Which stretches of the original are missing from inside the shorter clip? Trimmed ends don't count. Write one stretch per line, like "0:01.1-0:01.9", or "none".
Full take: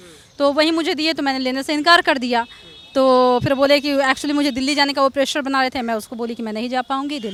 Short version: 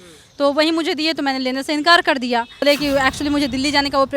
0:02.6-0:03.7